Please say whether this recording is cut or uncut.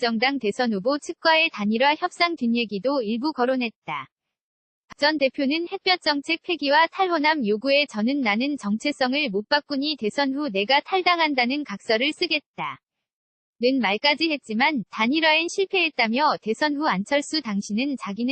cut